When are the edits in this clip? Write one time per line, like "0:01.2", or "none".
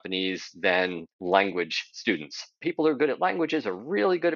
0:01.1
0:02.6